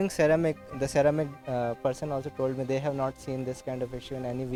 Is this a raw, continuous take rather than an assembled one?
yes; 0 cuts

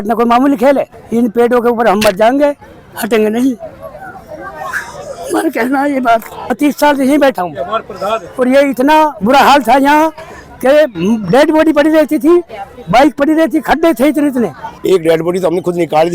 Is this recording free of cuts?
no; 3 cuts; at 1.0 s, 6.4 s, 14.7 s

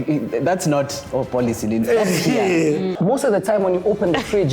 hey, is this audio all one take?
no; 1 cut; at 2.9 s

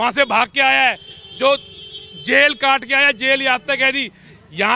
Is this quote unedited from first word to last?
yes; 0 cuts

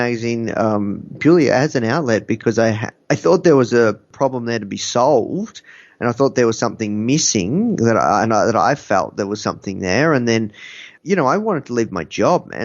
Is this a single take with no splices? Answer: no; 3 cuts; at 2.9 s, 4.1 s, 10.9 s

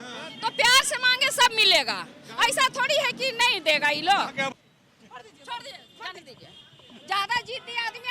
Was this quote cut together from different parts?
yes; 1 cut; at 4.5 s

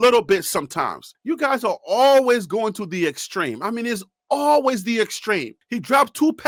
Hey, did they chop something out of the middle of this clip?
no; 0 cuts

